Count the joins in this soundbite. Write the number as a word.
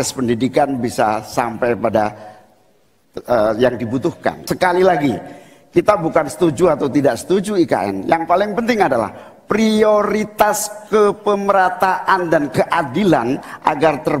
one